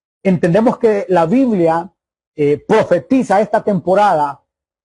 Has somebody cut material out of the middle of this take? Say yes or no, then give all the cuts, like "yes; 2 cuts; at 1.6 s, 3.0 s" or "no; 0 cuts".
no; 0 cuts